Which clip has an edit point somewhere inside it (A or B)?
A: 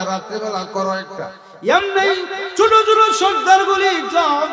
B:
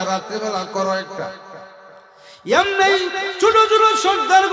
A